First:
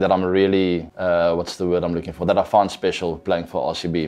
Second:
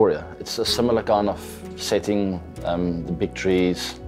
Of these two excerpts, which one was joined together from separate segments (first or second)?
first